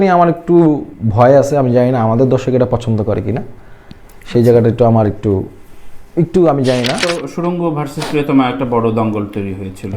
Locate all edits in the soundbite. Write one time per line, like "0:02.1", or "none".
0:07.1